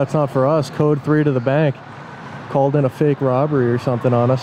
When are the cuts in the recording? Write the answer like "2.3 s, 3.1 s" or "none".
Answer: none